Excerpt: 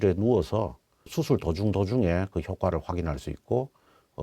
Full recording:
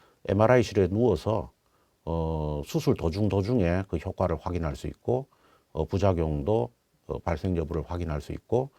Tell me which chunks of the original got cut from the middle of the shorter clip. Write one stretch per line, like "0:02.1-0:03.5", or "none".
0:01.8-0:02.6